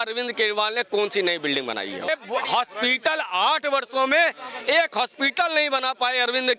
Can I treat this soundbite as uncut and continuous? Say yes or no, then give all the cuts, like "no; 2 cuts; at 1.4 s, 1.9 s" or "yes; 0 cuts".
no; 1 cut; at 2.1 s